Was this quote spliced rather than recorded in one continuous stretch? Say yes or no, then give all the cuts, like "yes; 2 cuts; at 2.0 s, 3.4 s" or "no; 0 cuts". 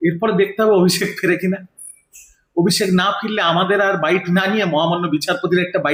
no; 0 cuts